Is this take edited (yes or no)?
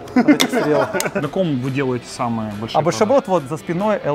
yes